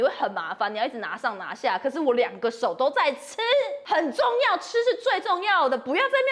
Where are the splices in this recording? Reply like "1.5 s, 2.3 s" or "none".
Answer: 3.8 s